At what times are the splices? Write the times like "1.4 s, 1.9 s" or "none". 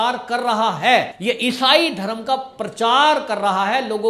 none